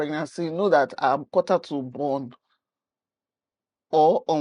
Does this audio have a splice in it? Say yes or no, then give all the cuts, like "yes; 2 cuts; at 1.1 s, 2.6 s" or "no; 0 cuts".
no; 0 cuts